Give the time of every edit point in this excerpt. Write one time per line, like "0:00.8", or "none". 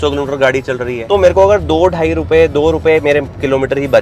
0:01.0